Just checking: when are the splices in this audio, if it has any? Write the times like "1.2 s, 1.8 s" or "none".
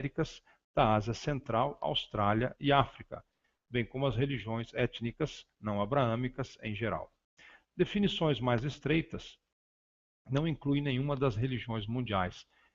9.2 s